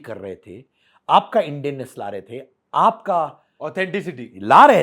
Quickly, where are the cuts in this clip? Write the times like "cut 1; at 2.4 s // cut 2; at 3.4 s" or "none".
none